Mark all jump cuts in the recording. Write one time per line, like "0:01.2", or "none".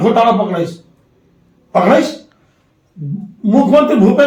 none